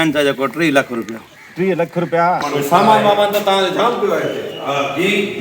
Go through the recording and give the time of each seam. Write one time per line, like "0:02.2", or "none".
0:02.4